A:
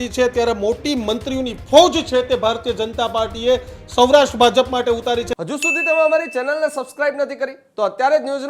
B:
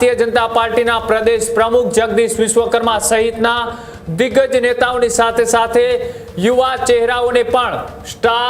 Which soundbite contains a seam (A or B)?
A